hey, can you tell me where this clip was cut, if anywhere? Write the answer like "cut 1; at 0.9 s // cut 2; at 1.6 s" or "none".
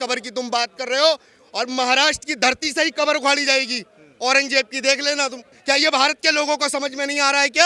cut 1; at 5.5 s